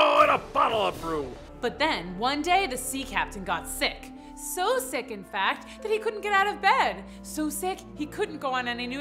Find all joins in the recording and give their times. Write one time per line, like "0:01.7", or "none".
0:01.4

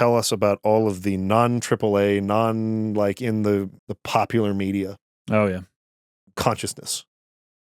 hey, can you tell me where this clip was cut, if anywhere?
0:03.8

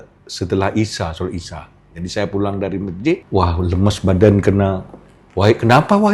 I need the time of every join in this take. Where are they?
0:03.2

